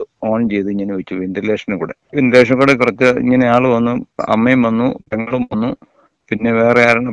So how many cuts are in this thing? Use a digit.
1